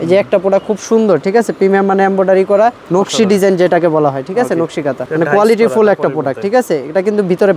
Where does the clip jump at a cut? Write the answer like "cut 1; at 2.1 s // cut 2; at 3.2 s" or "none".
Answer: cut 1; at 2.8 s // cut 2; at 5.0 s